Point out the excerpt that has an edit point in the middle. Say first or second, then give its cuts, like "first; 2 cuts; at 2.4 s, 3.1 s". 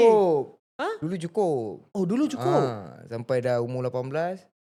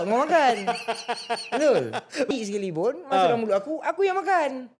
second; 1 cut; at 2.3 s